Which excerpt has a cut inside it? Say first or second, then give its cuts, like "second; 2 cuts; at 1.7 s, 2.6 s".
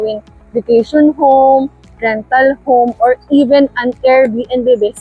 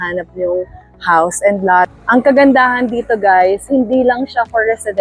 second; 1 cut; at 1.9 s